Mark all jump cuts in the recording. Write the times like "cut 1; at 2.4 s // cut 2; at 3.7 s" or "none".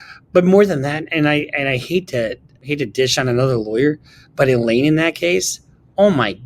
cut 1; at 2.6 s